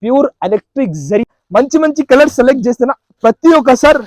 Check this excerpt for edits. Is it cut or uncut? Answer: cut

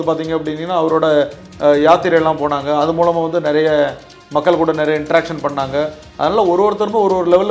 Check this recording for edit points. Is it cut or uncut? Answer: uncut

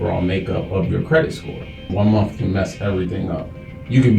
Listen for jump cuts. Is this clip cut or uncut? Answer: cut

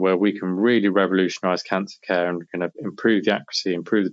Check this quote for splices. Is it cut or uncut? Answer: uncut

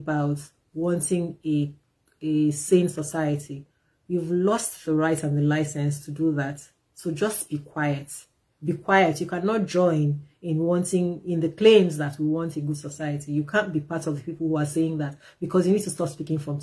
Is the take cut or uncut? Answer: uncut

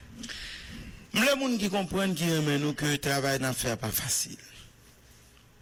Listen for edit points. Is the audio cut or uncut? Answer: uncut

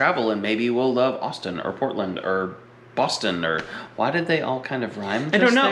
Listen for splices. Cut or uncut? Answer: uncut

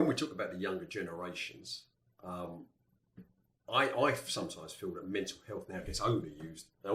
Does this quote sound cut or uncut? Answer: uncut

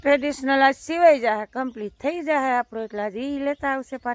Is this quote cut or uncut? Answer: uncut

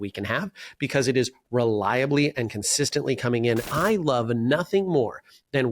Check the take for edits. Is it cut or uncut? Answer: cut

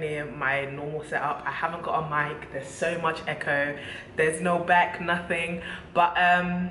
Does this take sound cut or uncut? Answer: uncut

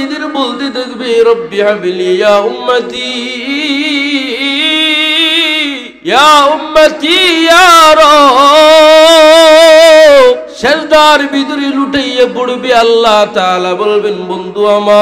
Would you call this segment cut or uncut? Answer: cut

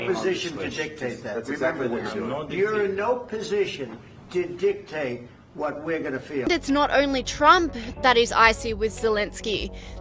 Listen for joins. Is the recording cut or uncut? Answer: cut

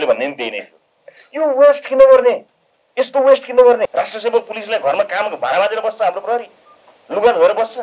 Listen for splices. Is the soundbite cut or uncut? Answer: cut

